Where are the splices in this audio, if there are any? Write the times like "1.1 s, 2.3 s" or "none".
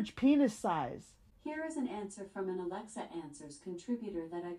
none

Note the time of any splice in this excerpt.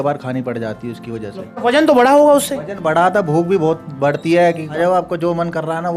1.6 s, 4.8 s

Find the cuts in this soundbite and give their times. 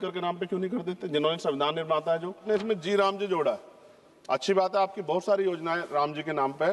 2.4 s

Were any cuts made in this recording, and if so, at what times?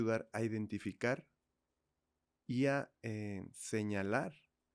none

